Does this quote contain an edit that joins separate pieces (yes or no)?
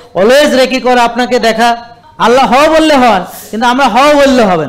yes